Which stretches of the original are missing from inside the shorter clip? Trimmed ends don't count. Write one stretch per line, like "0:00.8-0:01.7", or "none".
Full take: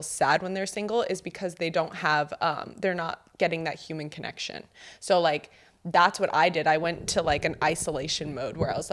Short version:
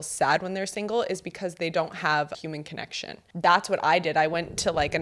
0:02.8-0:05.3